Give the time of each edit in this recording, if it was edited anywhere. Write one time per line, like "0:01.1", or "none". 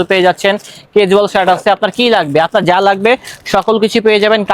none